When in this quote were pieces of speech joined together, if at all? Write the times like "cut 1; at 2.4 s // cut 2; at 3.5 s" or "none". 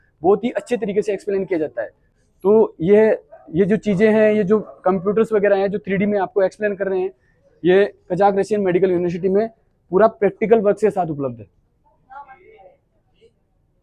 none